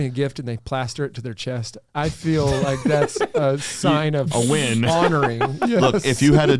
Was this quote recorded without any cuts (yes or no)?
no